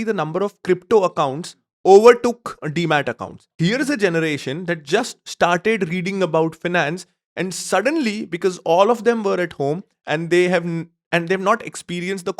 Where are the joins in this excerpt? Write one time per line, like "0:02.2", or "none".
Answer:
0:03.5